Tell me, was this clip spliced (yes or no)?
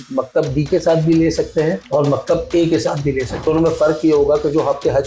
yes